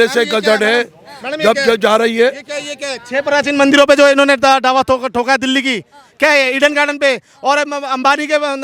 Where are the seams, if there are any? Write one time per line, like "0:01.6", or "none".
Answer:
none

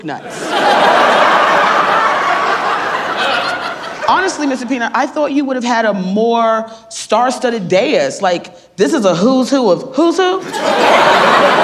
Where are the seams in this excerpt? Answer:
none

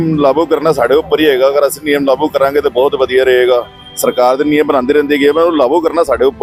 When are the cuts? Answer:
none

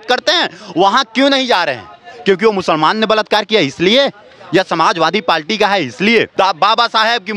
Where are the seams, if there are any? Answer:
0:06.3

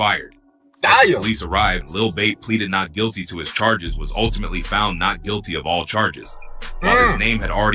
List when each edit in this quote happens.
0:01.8

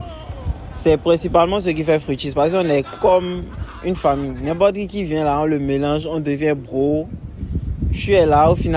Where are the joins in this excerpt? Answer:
none

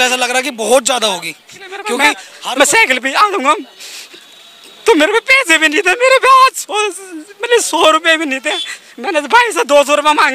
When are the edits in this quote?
0:01.7

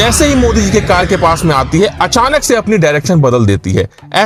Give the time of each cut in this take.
none

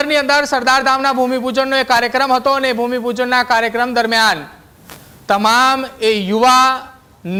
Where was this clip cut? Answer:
none

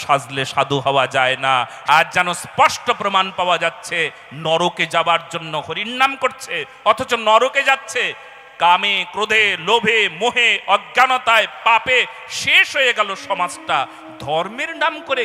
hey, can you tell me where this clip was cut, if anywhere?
0:01.7

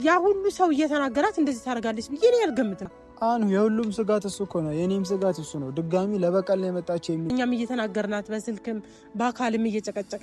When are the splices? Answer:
0:02.9
0:07.3

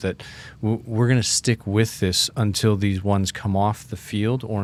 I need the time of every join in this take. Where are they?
none

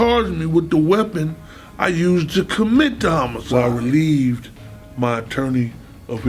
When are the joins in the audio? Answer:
0:03.4

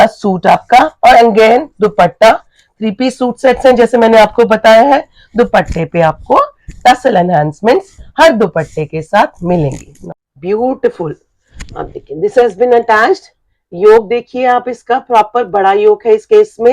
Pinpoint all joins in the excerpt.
0:09.9

